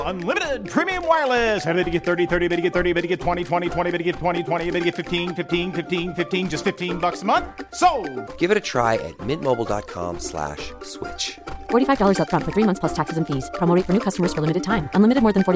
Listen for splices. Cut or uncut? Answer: uncut